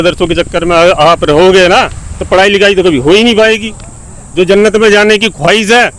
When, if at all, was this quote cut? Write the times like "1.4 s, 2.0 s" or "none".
none